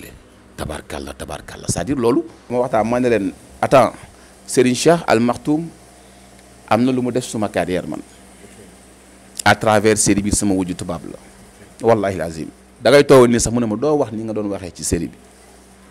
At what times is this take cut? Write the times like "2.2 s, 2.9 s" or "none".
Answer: 2.5 s

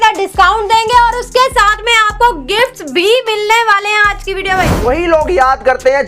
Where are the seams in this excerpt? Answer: 4.8 s

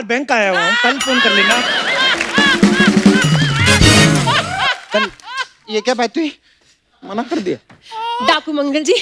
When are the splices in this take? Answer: none

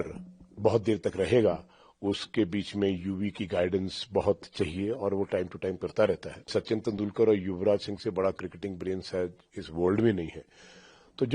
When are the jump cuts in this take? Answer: 6.5 s

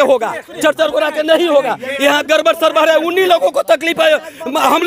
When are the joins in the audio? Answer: none

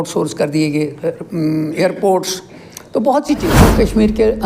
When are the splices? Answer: 3.5 s

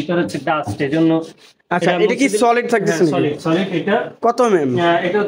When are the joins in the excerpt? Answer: none

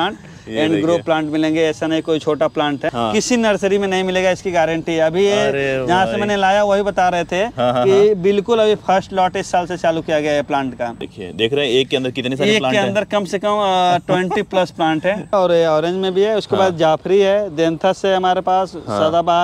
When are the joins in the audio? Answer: 2.9 s, 11.1 s, 15.3 s

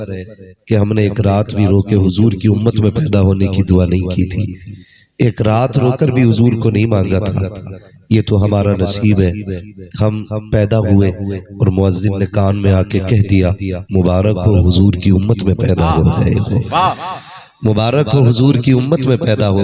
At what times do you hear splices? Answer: none

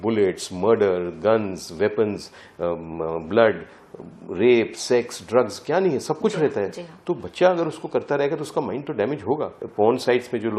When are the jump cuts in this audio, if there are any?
9.6 s

